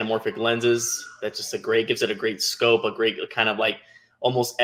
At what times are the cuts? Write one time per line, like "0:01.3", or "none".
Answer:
none